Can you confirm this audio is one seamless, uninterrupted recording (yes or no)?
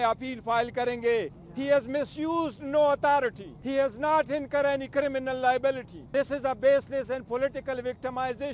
no